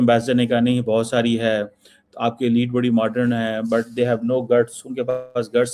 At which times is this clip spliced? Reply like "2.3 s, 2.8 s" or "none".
none